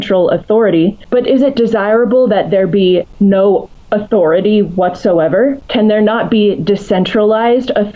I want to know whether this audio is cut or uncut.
cut